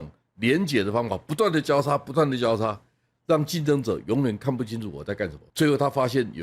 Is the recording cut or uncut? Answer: cut